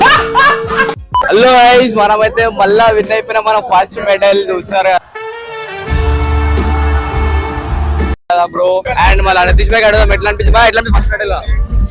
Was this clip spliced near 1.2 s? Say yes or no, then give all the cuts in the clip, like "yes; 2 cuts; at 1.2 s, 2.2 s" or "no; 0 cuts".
yes; 2 cuts; at 1.2 s, 8.9 s